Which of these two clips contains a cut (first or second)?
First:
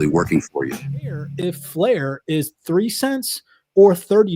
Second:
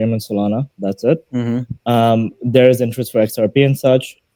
first